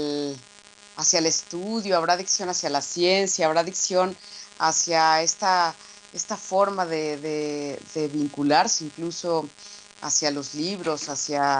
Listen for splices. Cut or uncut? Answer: cut